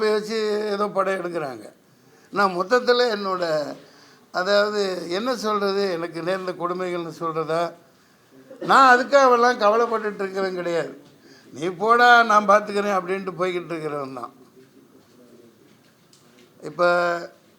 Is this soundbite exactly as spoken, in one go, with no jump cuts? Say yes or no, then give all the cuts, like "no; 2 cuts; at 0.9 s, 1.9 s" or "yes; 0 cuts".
yes; 0 cuts